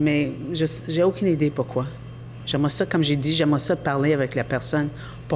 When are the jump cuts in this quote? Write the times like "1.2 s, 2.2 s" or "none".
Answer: none